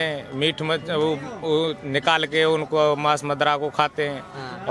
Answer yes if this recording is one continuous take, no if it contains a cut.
yes